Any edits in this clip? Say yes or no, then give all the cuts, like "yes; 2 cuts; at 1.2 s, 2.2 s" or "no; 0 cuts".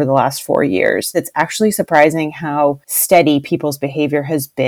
yes; 2 cuts; at 1.2 s, 2.9 s